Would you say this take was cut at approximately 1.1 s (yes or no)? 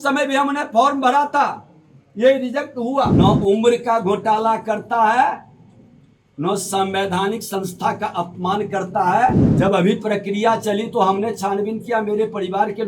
no